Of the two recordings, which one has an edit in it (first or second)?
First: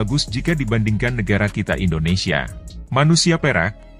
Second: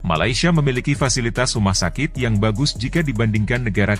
first